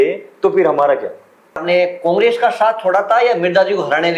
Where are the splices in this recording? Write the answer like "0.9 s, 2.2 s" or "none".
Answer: 1.6 s

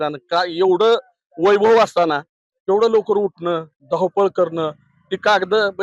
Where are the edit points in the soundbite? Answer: none

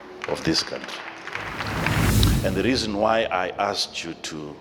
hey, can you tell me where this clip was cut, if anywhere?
2.1 s

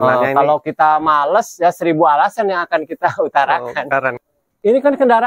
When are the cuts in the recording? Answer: 4.2 s

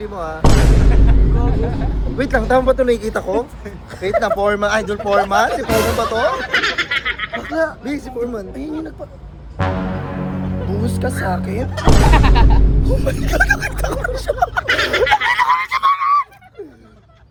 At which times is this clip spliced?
none

